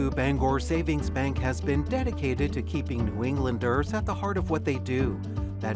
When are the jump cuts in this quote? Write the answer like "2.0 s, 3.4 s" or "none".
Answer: none